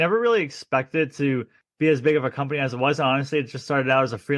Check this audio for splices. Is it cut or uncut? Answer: cut